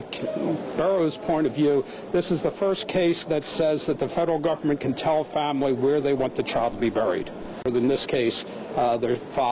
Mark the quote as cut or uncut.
cut